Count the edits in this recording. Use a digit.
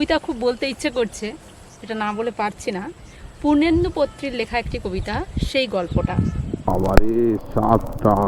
1